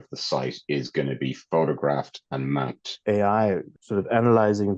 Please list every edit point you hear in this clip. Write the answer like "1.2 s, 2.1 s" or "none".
2.8 s, 3.7 s